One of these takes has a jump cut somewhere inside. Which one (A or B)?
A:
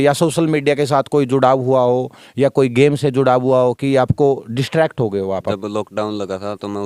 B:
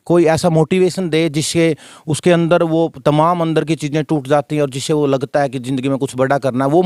A